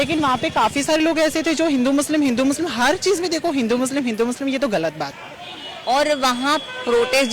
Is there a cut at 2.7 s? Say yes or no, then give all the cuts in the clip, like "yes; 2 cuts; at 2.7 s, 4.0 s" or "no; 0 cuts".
no; 1 cut; at 5.3 s